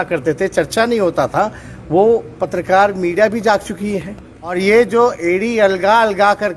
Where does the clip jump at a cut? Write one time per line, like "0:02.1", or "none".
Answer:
0:04.5